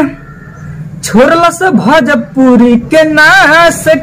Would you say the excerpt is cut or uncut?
uncut